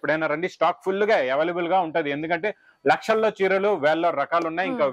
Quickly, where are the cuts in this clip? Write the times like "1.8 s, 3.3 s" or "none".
none